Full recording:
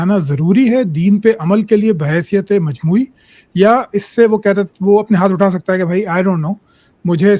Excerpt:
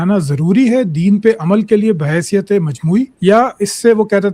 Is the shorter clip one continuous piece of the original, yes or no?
no